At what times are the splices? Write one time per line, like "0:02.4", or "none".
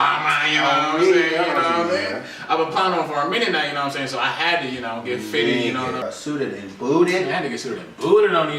0:02.3
0:06.0